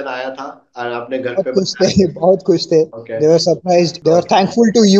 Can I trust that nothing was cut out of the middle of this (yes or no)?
no